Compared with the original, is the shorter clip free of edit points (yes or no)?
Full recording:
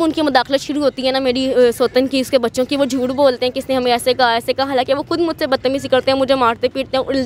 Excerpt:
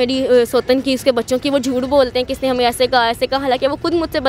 yes